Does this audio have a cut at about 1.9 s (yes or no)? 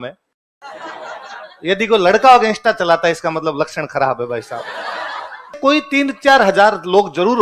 no